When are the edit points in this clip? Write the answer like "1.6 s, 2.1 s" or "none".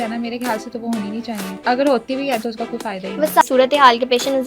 1.6 s, 3.4 s